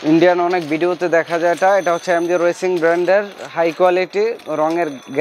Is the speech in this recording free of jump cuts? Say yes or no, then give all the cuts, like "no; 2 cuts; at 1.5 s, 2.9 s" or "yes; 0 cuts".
yes; 0 cuts